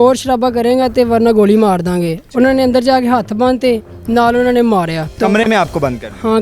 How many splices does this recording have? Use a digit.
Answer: 1